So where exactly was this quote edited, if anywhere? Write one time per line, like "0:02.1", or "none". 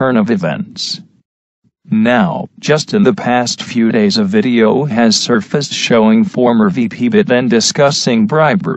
0:05.2